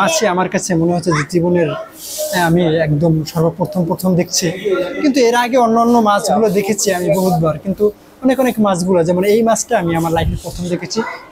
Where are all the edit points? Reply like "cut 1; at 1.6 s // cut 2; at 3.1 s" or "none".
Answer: none